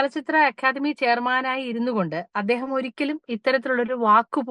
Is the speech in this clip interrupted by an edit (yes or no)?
no